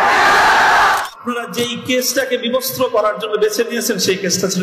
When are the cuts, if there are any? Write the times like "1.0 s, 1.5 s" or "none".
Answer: 1.0 s